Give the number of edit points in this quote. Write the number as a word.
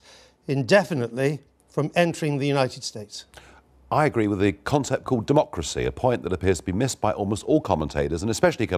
one